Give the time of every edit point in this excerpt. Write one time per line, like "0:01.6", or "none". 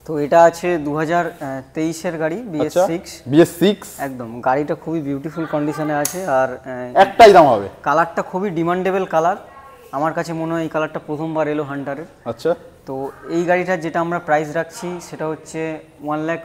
none